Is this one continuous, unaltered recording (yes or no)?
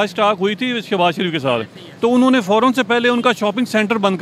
yes